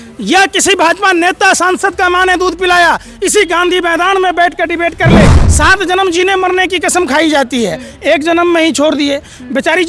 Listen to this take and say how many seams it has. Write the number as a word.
one